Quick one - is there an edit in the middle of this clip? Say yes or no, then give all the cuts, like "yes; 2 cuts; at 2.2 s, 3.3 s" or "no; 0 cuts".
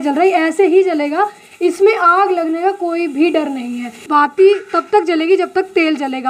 yes; 1 cut; at 4.0 s